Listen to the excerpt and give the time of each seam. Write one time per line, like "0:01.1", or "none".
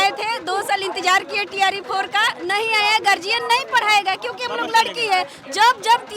none